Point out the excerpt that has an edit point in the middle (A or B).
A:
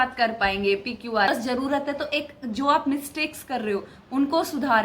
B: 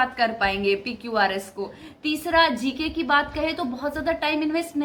A